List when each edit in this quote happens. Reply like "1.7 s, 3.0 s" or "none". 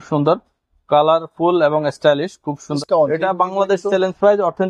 2.7 s